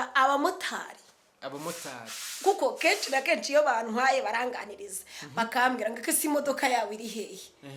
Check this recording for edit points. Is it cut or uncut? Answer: uncut